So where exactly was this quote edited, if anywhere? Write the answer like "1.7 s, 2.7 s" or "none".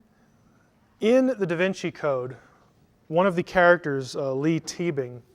1.0 s